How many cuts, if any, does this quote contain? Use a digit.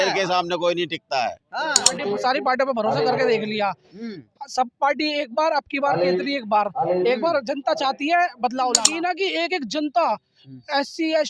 2